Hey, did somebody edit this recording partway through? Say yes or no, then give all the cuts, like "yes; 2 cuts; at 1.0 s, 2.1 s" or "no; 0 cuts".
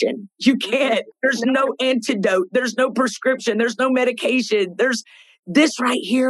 yes; 1 cut; at 1.1 s